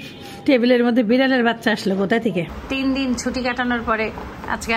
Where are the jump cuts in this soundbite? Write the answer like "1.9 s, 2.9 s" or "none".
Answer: 2.6 s